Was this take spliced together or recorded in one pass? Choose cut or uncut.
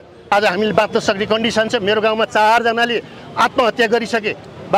uncut